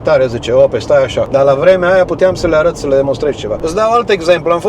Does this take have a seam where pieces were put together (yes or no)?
yes